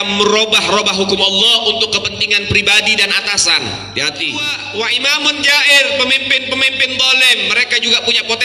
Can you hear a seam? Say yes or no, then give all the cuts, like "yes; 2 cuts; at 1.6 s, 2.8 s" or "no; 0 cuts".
yes; 1 cut; at 4.6 s